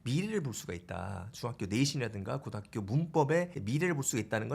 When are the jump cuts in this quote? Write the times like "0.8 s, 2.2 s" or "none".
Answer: 3.6 s